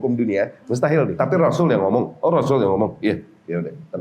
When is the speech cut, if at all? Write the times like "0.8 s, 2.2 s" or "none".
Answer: 1.1 s